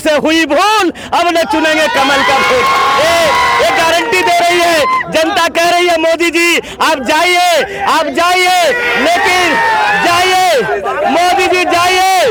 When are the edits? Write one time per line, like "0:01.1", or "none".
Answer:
none

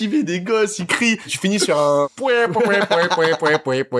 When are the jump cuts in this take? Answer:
0:01.3
0:02.1

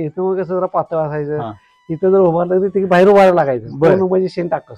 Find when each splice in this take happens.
none

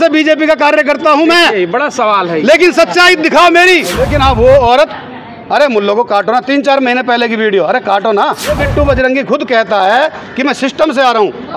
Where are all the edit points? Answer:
0:04.0
0:08.6

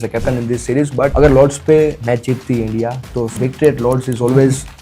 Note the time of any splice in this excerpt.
0:01.1
0:02.0
0:03.3

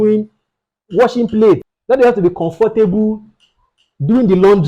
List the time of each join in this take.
0:01.7

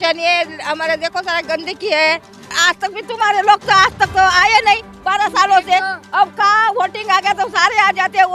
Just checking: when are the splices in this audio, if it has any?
0:02.5

